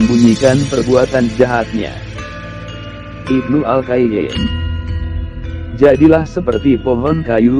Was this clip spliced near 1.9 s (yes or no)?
yes